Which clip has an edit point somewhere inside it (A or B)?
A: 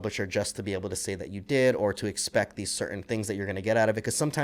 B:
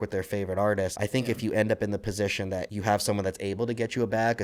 B